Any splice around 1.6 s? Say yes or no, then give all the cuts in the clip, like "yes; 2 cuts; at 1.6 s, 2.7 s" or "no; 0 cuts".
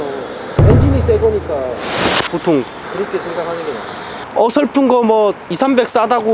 no; 2 cuts; at 2.8 s, 4.2 s